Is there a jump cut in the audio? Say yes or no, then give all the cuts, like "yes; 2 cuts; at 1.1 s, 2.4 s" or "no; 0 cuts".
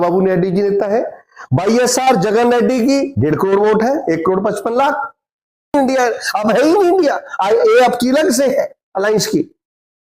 yes; 1 cut; at 5.7 s